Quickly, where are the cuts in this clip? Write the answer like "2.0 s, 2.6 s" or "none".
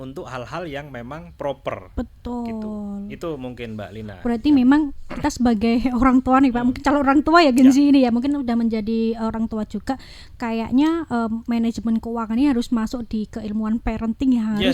none